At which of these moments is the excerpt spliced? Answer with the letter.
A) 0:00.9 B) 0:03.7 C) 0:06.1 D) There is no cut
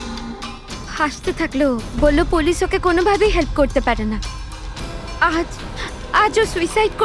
A